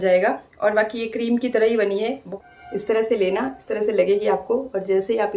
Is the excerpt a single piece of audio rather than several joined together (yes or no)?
no